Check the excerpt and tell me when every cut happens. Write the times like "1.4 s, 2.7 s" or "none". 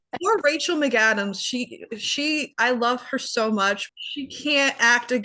3.9 s